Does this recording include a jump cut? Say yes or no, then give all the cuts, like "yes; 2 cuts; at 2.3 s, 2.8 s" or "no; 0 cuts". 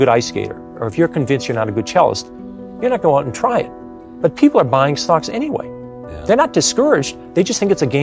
no; 0 cuts